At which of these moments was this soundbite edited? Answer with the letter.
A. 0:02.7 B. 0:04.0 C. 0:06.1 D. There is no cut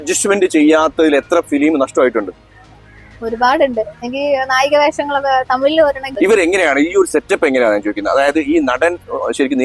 C